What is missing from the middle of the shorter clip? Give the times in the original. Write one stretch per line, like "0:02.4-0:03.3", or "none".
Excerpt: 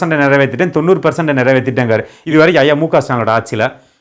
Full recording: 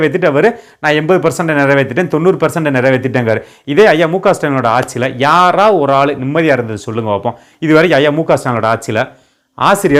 0:03.5-0:07.5